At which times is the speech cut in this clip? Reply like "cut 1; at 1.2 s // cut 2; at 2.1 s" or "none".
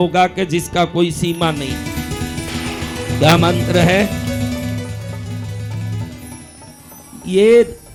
none